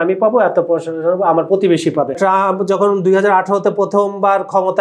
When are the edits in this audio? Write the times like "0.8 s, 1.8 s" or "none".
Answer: 2.2 s